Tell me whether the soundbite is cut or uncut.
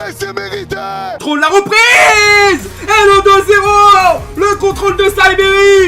cut